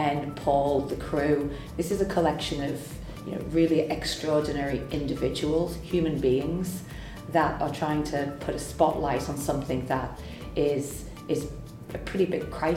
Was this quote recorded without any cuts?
no; 1 cut; at 1.6 s

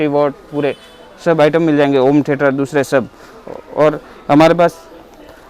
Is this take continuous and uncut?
yes; 0 cuts

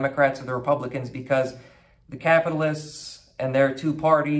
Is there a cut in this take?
no; 0 cuts

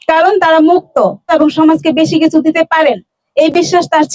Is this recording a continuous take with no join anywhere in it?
no; 1 cut; at 1.2 s

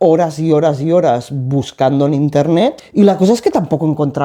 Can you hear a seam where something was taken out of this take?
yes; 1 cut; at 2.8 s

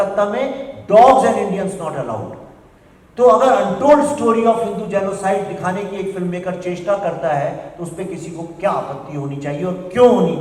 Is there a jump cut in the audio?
no; 0 cuts

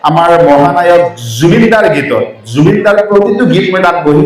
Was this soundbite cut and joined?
no; 0 cuts

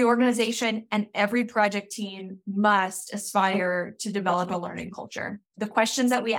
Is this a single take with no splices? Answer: no; 1 cut; at 5.5 s

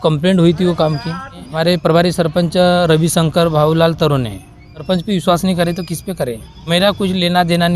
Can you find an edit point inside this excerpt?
yes; 3 cuts; at 1.4 s, 4.8 s, 6.6 s

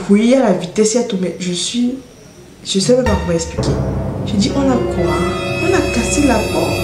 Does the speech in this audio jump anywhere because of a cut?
no; 0 cuts

